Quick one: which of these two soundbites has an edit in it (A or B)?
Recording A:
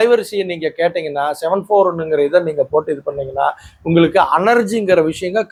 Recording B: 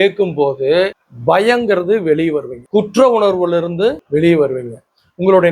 B